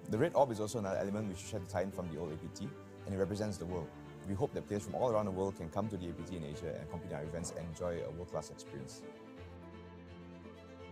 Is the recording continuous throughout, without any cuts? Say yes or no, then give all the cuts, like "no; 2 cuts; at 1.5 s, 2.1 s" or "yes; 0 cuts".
yes; 0 cuts